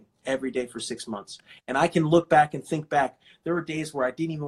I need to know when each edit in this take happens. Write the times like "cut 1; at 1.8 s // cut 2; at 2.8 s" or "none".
none